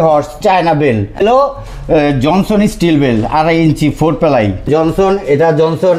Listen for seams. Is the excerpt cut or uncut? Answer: cut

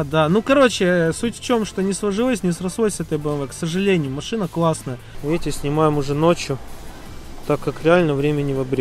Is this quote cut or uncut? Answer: cut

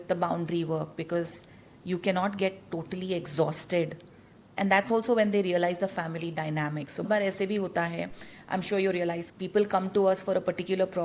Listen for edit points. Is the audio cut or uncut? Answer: cut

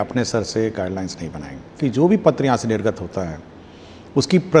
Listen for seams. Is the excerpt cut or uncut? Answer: cut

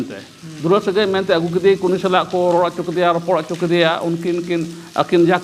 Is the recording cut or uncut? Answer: uncut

